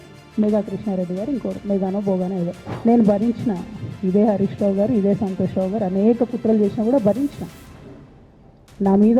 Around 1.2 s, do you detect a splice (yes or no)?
no